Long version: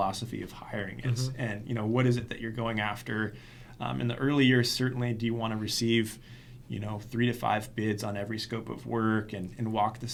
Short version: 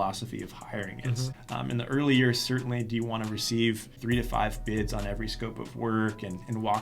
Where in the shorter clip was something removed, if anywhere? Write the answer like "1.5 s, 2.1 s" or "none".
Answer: 1.3 s, 3.9 s